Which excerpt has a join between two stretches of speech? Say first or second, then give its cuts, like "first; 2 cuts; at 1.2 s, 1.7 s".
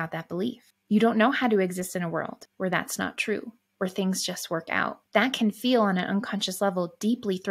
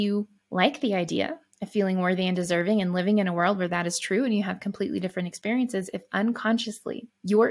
first; 2 cuts; at 2.4 s, 5.0 s